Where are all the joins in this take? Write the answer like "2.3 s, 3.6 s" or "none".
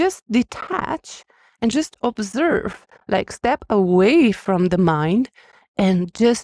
none